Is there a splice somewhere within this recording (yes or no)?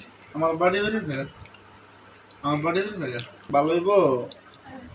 no